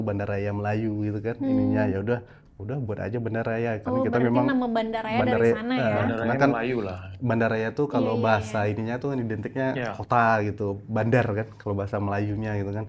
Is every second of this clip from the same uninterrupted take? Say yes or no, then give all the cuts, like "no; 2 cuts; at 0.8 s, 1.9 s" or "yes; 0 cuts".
yes; 0 cuts